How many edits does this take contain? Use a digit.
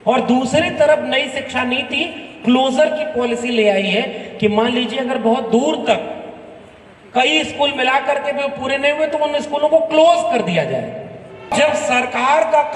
1